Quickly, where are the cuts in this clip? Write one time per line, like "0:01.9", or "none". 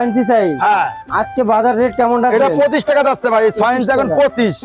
none

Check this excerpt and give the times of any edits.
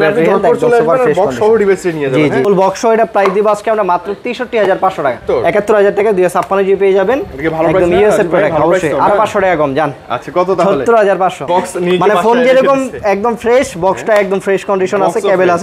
0:02.5
0:05.2
0:11.5

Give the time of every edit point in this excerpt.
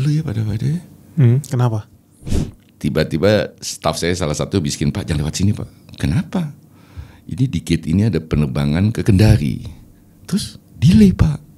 0:02.1

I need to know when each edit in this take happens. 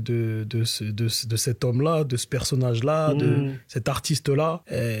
none

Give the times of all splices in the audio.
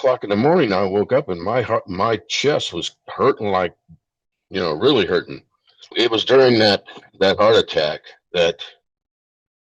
0:05.9

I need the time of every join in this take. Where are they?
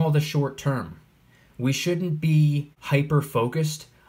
0:02.7

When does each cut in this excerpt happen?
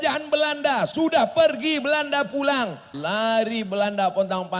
0:02.9

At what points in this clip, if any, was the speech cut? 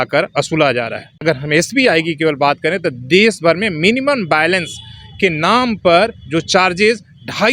0:01.2

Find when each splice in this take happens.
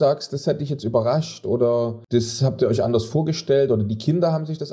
0:02.0

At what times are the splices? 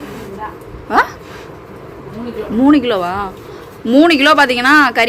none

